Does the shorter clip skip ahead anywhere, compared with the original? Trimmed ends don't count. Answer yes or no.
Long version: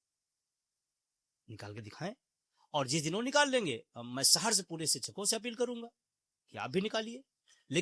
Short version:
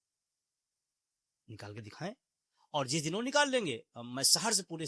no